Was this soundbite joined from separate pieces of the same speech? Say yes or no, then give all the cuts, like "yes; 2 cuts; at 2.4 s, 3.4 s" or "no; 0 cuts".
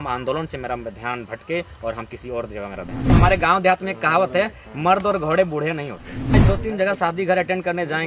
yes; 2 cuts; at 3.1 s, 6.3 s